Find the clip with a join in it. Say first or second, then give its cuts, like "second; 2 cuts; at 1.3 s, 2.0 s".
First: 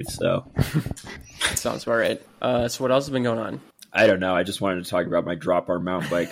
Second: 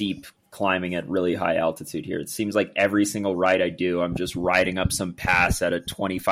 first; 1 cut; at 2.3 s